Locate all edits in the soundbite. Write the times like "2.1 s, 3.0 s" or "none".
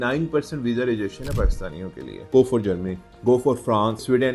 2.2 s